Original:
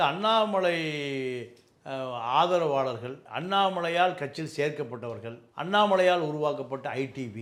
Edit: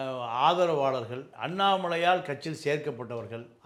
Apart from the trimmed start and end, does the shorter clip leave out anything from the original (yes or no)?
no